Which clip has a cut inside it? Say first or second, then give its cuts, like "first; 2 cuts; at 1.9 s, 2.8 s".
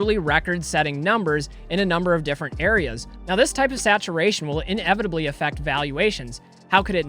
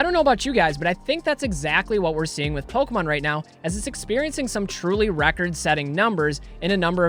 first; 1 cut; at 3.1 s